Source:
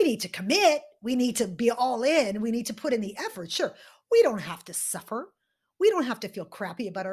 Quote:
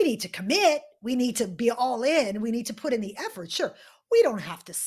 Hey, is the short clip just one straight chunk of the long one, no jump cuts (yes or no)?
yes